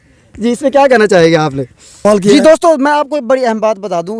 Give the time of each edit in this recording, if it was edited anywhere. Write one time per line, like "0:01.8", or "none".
0:02.0